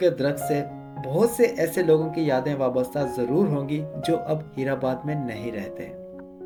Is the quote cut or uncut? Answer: uncut